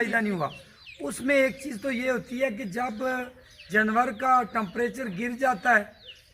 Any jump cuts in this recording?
no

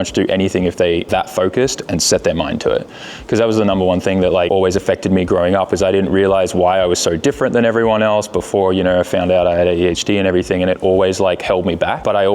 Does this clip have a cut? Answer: yes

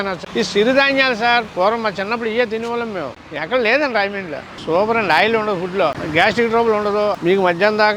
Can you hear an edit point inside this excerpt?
yes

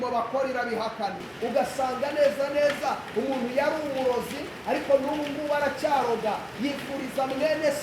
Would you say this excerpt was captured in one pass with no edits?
no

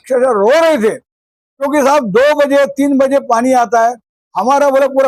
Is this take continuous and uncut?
yes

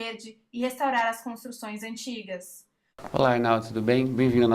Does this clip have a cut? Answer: yes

